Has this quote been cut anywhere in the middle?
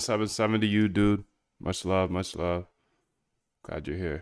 no; 0 cuts

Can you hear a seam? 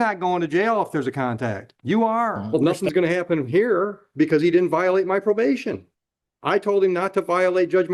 yes; 1 cut; at 2.6 s

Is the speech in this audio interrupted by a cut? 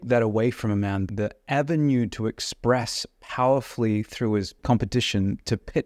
yes; 2 cuts; at 1.1 s, 4.6 s

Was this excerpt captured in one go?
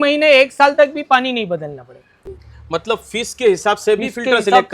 no; 1 cut; at 2.1 s

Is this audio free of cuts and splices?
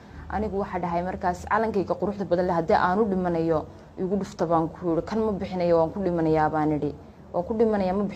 yes; 0 cuts

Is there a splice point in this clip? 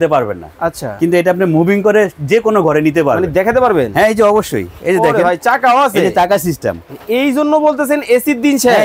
no; 0 cuts

